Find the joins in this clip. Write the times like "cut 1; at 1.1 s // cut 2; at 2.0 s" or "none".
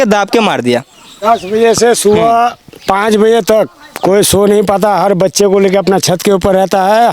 cut 1; at 1.2 s